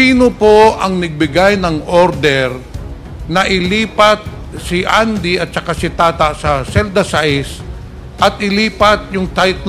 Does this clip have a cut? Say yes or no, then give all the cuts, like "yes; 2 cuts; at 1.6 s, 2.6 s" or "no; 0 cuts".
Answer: no; 0 cuts